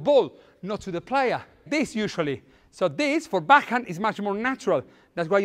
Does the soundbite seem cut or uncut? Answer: cut